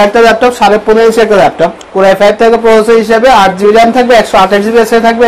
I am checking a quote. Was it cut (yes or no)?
yes